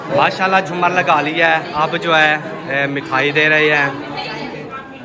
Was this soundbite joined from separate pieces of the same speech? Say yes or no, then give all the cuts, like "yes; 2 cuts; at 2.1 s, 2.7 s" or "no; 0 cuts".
no; 0 cuts